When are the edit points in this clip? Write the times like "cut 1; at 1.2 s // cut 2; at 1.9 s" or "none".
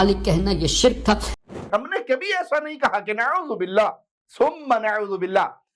cut 1; at 1.3 s